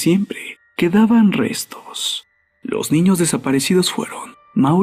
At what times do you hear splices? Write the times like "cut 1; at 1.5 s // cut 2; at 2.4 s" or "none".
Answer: cut 1; at 1.0 s